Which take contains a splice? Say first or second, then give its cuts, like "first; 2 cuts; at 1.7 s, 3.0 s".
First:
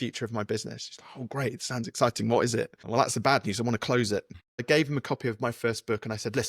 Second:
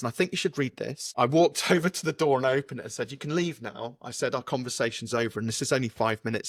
first; 1 cut; at 4.6 s